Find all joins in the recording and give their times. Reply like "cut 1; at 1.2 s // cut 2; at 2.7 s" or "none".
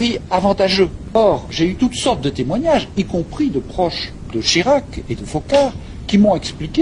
cut 1; at 1.0 s